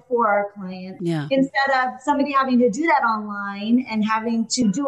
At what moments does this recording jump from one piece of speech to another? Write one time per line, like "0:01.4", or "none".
0:01.0